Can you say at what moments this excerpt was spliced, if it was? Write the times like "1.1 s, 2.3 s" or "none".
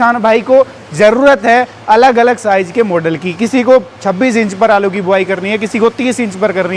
none